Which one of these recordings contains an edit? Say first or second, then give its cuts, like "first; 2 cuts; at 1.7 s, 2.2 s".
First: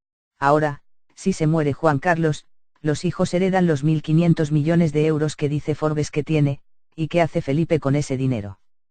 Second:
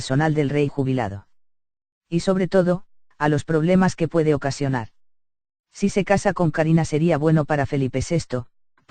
first; 1 cut; at 6.7 s